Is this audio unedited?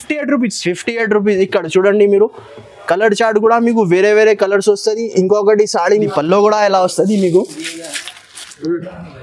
no; 1 cut; at 5.9 s

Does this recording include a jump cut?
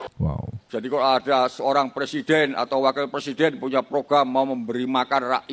no; 0 cuts

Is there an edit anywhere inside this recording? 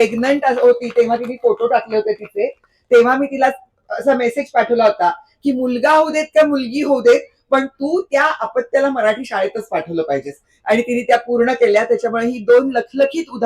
yes; 1 cut; at 10.5 s

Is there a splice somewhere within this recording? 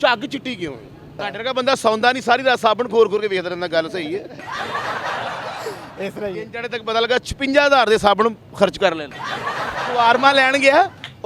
yes; 2 cuts; at 1.2 s, 9.8 s

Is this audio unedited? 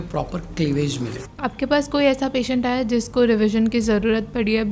no; 1 cut; at 1.2 s

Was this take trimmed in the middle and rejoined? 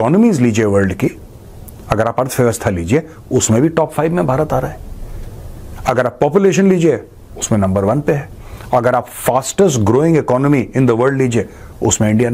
no; 0 cuts

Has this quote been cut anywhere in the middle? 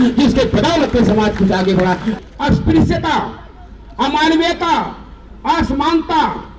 yes; 1 cut; at 2.1 s

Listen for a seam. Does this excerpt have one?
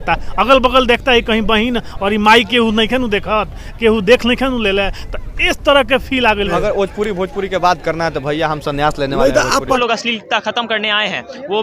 yes; 2 cuts; at 6.5 s, 9.8 s

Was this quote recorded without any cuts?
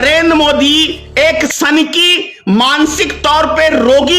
no; 1 cut; at 1.5 s

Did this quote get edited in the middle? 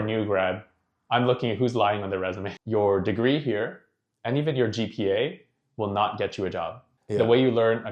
yes; 2 cuts; at 2.5 s, 6.9 s

